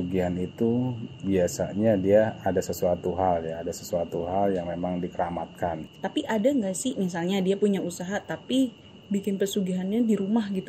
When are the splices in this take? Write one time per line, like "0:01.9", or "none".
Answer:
0:05.9